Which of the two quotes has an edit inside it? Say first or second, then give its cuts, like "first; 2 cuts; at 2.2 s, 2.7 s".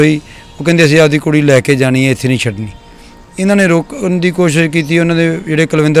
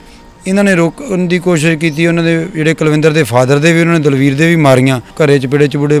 second; 1 cut; at 5.1 s